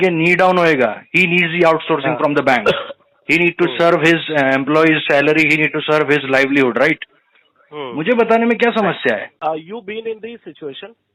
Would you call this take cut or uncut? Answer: cut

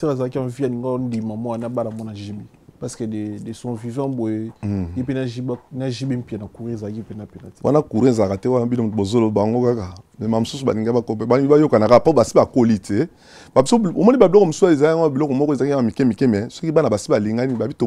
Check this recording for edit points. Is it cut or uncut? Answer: uncut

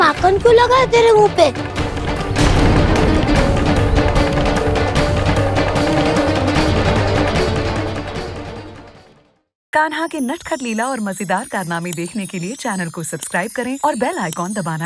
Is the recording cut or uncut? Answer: cut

